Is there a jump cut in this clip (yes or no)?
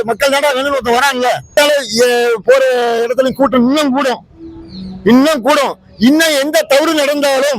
yes